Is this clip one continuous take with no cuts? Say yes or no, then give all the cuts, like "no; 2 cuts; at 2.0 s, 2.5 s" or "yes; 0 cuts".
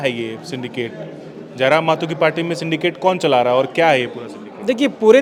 yes; 0 cuts